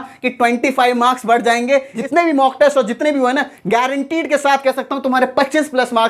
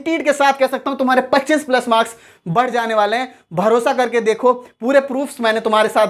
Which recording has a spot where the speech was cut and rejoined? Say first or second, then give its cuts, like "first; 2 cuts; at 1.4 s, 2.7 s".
first; 1 cut; at 2.0 s